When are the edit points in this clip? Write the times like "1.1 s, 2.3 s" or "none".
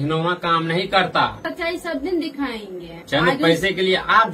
1.3 s, 2.9 s